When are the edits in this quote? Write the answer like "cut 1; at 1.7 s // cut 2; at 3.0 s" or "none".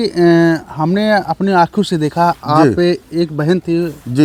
none